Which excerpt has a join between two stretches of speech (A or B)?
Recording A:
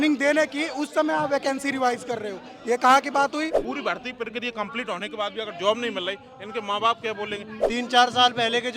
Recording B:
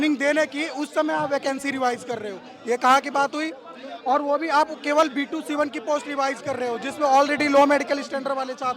A